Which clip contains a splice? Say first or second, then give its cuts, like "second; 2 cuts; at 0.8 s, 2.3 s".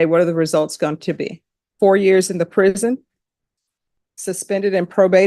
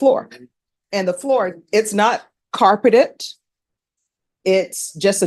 first; 1 cut; at 1.7 s